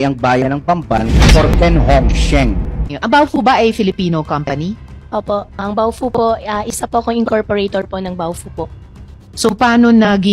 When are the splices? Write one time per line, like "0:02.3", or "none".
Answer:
0:02.9